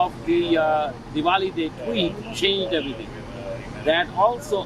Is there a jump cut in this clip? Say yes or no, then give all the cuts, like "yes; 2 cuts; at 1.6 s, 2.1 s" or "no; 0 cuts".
no; 0 cuts